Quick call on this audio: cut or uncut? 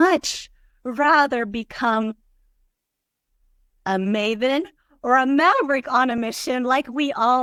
uncut